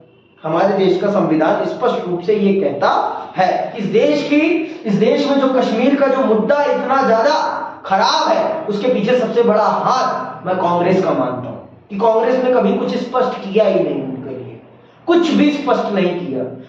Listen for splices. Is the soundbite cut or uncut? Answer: cut